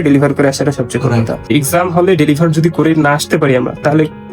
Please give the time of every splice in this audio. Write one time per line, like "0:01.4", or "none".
0:01.4